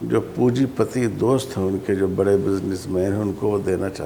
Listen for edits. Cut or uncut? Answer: uncut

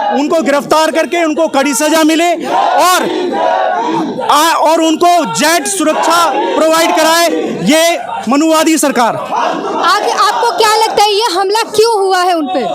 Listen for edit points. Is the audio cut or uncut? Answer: uncut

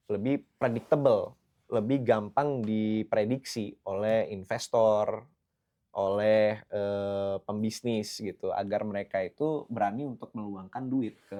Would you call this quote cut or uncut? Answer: uncut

